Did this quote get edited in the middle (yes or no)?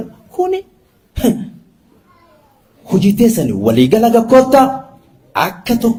no